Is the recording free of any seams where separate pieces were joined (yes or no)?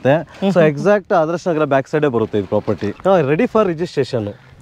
no